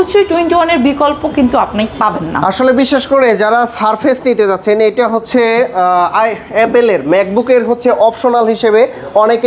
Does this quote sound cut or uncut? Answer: uncut